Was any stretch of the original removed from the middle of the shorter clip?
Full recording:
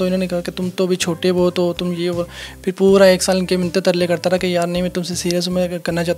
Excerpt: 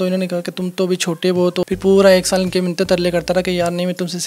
yes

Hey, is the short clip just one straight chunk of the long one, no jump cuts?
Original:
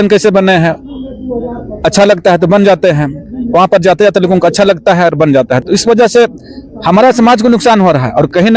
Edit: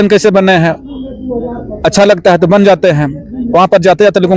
yes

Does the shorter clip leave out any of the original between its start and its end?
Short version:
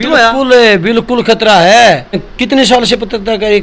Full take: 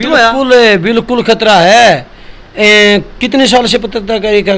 yes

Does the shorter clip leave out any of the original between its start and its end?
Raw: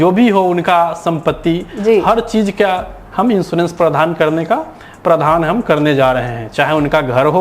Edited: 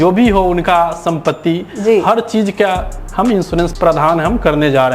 yes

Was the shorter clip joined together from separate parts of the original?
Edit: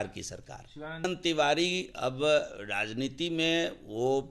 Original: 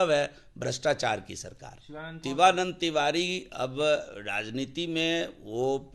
yes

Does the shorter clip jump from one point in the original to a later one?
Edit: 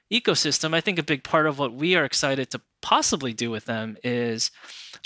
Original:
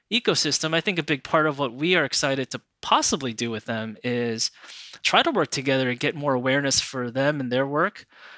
no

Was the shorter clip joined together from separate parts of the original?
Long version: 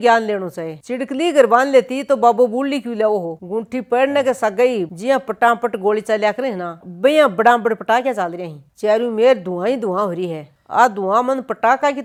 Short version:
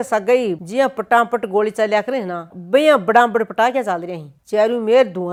no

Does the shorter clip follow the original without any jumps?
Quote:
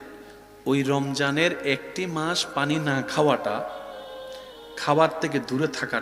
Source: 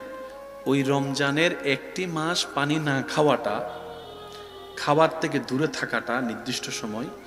yes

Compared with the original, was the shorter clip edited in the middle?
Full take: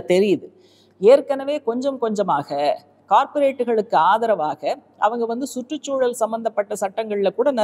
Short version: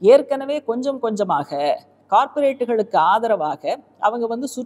no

